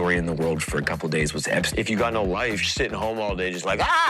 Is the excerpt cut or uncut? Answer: cut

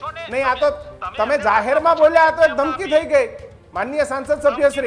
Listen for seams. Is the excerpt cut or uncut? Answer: uncut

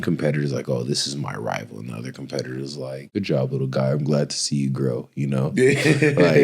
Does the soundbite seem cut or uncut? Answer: cut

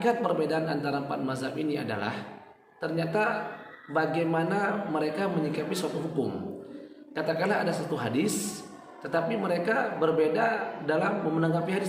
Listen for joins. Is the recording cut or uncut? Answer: uncut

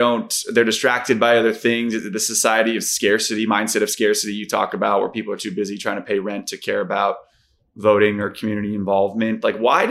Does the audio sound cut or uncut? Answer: uncut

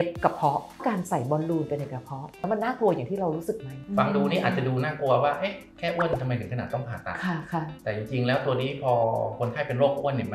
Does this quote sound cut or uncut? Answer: cut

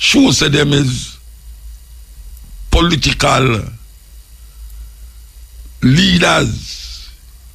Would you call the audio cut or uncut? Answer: uncut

